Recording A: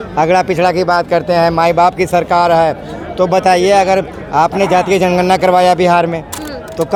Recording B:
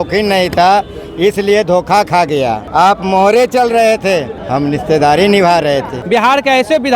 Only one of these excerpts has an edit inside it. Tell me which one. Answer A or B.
B